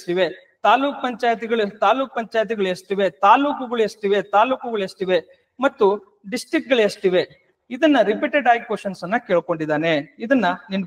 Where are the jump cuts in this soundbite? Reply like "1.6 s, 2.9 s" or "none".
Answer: none